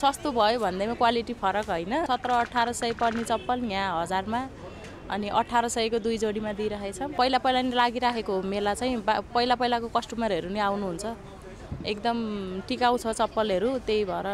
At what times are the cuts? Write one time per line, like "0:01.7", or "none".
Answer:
0:02.1
0:07.1